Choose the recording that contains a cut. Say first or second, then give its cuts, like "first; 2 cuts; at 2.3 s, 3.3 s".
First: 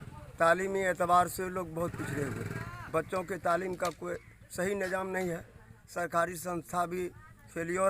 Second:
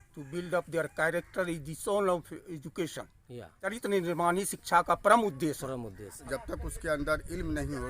second; 2 cuts; at 3.6 s, 6.2 s